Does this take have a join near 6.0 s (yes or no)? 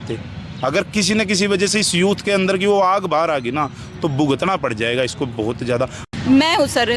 yes